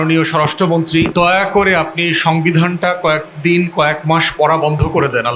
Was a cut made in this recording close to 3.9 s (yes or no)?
no